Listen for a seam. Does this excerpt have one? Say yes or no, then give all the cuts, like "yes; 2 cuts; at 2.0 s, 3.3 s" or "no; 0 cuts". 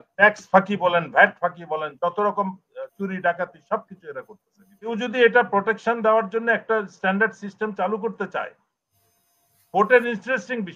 yes; 1 cut; at 4.9 s